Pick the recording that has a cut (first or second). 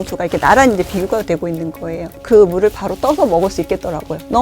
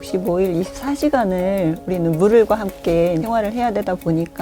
first